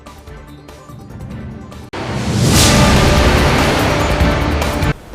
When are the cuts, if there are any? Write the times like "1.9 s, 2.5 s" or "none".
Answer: none